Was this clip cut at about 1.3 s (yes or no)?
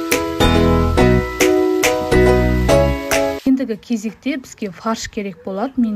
yes